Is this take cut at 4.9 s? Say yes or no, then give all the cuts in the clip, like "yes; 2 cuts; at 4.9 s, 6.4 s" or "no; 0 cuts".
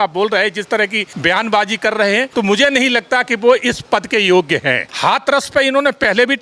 yes; 3 cuts; at 1.1 s, 2.3 s, 4.9 s